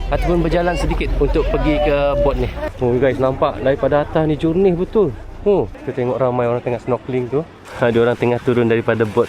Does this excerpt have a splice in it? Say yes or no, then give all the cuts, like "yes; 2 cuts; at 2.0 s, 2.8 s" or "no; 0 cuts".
yes; 3 cuts; at 2.6 s, 5.8 s, 7.6 s